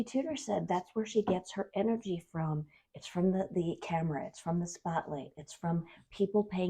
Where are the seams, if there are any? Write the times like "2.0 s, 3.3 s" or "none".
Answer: 5.4 s